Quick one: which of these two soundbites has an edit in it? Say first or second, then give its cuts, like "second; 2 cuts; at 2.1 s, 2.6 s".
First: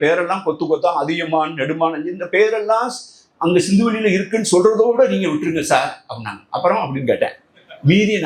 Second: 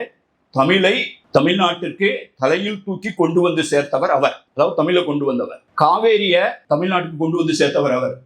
second; 4 cuts; at 1.1 s, 4.4 s, 5.6 s, 6.6 s